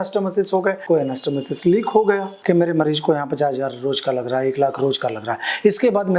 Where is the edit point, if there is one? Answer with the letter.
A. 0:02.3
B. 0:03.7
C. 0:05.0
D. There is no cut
A